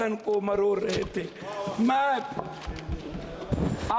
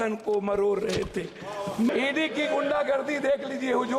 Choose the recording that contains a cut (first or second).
second